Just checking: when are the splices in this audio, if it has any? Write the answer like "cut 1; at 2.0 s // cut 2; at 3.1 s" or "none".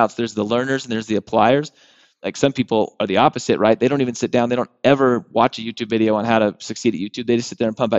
cut 1; at 2.3 s